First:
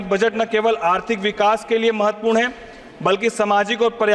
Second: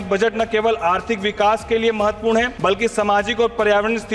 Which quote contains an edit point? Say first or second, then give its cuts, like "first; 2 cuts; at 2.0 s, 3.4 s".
second; 1 cut; at 2.5 s